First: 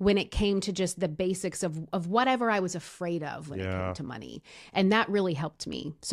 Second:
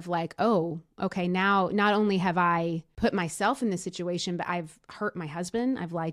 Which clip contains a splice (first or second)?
second